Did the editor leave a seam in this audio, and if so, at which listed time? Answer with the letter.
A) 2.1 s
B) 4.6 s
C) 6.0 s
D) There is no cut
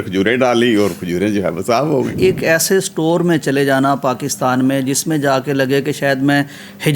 A